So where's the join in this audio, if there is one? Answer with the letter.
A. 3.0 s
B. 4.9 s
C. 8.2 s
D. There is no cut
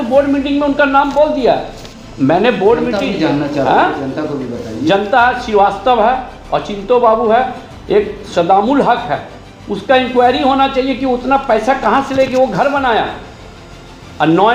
D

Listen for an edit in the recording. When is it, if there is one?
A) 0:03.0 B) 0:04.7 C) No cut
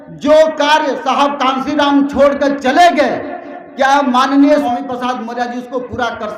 B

